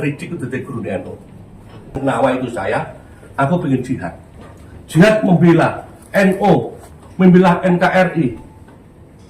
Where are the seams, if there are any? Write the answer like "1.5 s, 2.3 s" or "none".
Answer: 2.0 s